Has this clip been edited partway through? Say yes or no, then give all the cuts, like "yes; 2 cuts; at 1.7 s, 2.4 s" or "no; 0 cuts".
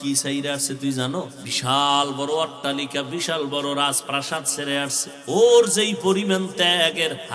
yes; 2 cuts; at 1.5 s, 5.1 s